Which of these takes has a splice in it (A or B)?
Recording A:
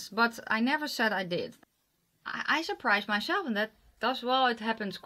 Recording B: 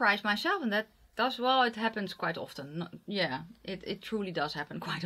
A